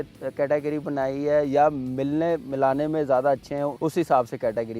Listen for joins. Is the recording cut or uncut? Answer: cut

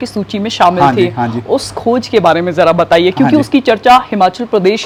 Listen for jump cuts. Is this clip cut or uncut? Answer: uncut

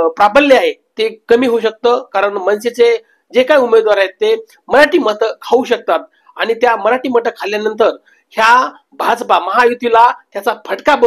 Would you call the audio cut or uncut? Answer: uncut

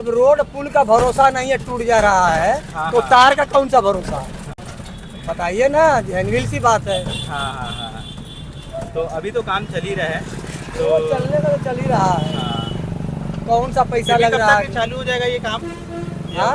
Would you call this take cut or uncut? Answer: uncut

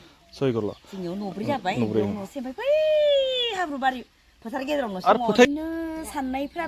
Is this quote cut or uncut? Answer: cut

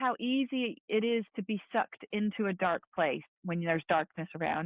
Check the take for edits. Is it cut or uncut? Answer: uncut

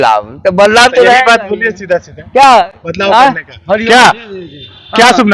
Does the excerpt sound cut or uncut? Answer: uncut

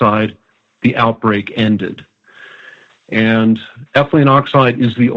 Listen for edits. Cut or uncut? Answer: uncut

